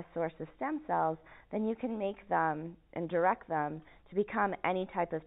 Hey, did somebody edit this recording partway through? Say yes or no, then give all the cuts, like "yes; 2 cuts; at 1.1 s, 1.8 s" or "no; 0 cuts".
no; 0 cuts